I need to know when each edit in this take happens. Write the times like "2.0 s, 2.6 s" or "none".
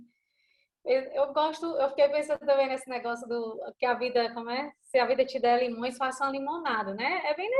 none